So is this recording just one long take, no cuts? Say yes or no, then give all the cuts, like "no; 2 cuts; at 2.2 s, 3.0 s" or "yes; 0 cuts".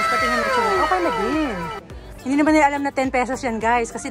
yes; 0 cuts